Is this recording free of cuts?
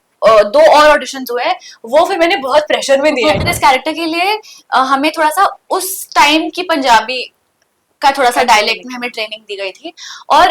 no; 1 cut; at 3.5 s

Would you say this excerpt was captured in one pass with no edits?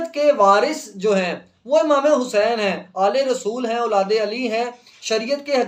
yes; 0 cuts

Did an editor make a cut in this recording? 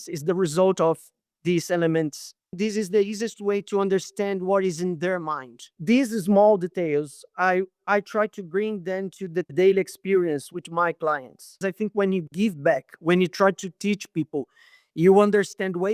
yes; 3 cuts; at 2.6 s, 5.7 s, 11.6 s

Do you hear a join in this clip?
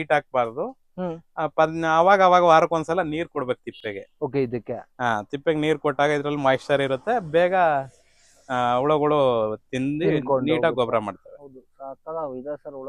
no; 0 cuts

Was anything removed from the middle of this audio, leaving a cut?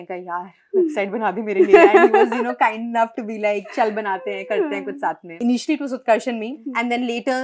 yes; 2 cuts; at 5.4 s, 6.7 s

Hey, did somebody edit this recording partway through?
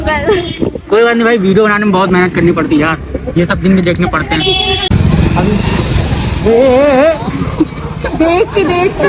yes; 1 cut; at 4.8 s

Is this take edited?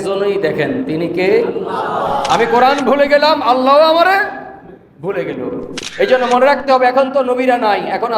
yes; 1 cut; at 2.2 s

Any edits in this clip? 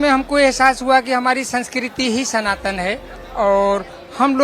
yes; 1 cut; at 3.1 s

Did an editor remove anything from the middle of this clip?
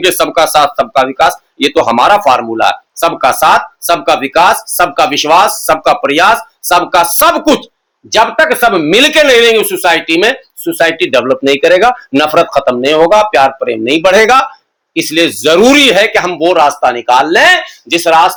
no; 0 cuts

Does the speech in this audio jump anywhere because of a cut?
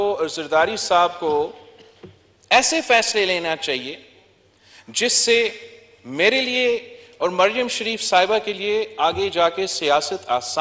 no; 0 cuts

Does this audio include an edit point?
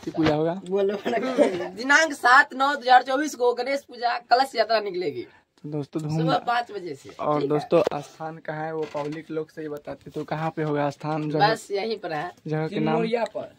no; 0 cuts

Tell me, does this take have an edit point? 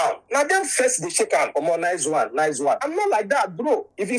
no; 0 cuts

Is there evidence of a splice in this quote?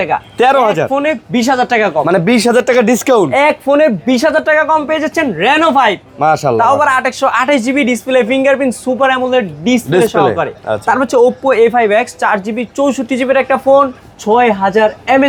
no; 0 cuts

